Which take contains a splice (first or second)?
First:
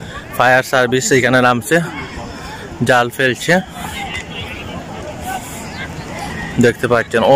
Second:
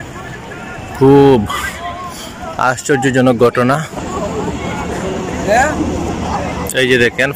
second